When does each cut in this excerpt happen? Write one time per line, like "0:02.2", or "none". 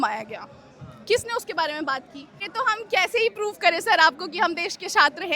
0:02.4